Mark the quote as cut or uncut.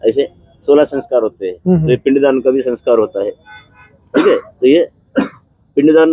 uncut